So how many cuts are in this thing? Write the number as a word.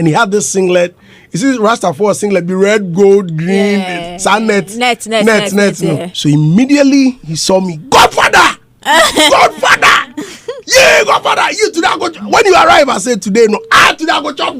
one